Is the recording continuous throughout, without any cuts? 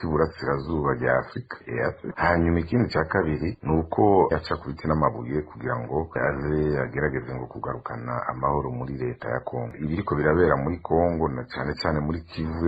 no; 1 cut; at 9.7 s

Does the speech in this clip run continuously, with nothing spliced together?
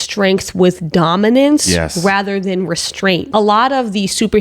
no; 1 cut; at 3.3 s

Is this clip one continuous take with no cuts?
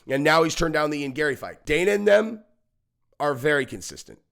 no; 1 cut; at 1.5 s

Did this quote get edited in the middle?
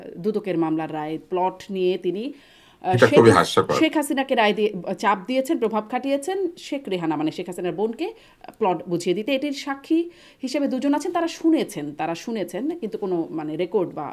no; 0 cuts

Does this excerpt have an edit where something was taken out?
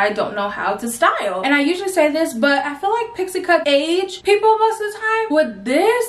yes; 1 cut; at 1.4 s

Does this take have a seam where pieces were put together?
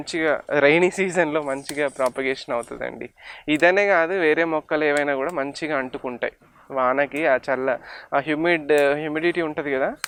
no; 0 cuts

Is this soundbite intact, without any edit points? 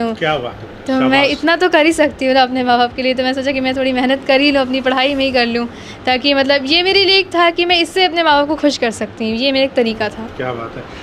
yes; 0 cuts

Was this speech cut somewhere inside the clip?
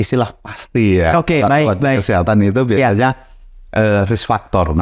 no; 0 cuts

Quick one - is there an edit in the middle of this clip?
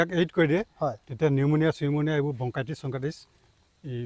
no; 0 cuts

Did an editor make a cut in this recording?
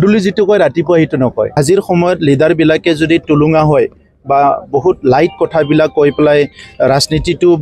yes; 1 cut; at 1.6 s

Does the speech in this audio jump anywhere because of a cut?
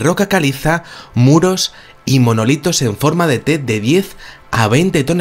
yes; 1 cut; at 4.3 s

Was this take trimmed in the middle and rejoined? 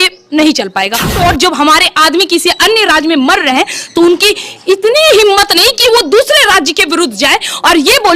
yes; 1 cut; at 1.1 s

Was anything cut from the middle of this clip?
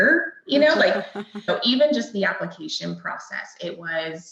yes; 1 cut; at 1.5 s

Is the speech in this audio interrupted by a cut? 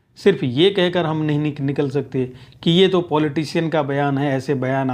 no; 0 cuts

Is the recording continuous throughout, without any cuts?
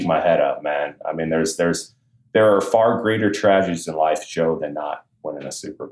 yes; 0 cuts

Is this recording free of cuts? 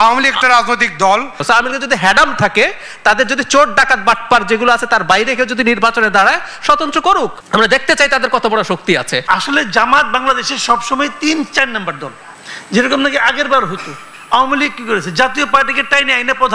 no; 3 cuts; at 1.4 s, 7.4 s, 9.2 s

